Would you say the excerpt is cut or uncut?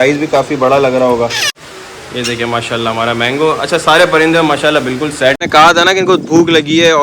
cut